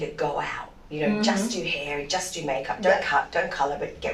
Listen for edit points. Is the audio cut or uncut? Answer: uncut